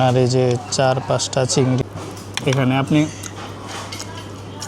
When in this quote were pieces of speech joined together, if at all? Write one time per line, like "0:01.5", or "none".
0:01.8

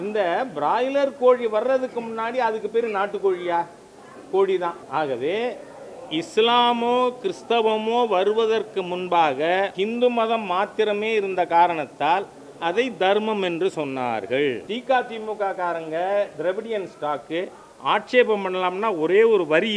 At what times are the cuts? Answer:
0:04.8
0:09.7
0:14.7

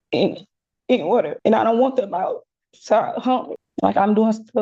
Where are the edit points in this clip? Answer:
0:01.3
0:03.6

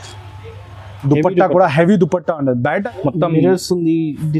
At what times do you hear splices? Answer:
0:02.9

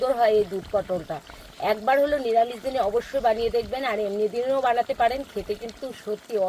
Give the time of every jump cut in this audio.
none

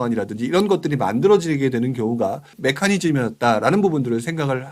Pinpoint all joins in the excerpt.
0:02.5

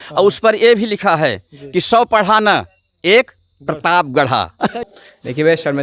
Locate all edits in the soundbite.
0:04.5

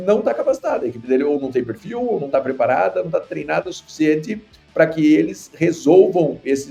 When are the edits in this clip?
none

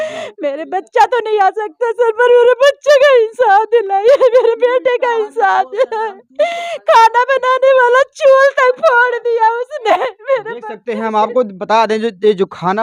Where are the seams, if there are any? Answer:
none

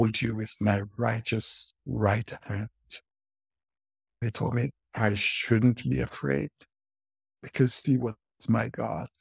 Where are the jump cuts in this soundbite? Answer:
0:04.2

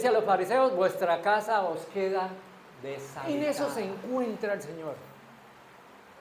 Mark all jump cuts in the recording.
0:03.1

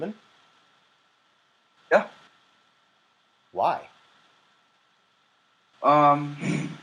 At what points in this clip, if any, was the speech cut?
0:05.7

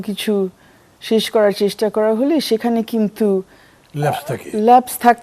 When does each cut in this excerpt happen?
none

